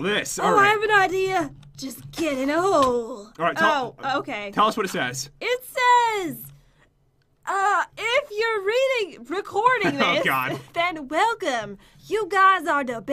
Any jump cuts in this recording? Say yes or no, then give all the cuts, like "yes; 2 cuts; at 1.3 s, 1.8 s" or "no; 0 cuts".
yes; 1 cut; at 11.4 s